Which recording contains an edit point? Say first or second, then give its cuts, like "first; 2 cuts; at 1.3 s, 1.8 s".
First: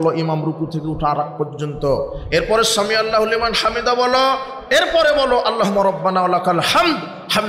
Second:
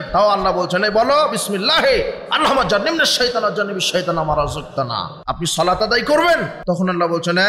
second; 2 cuts; at 5.2 s, 6.5 s